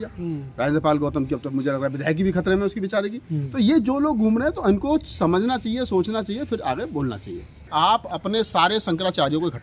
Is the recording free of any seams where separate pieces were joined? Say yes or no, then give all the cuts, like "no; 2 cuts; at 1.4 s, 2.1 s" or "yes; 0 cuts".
no; 1 cut; at 7.7 s